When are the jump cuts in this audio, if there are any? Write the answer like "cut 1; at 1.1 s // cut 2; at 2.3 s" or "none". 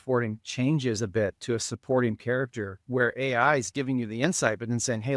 none